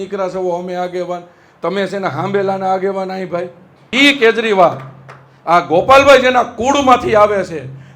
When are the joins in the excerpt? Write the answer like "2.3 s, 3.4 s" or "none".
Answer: 3.9 s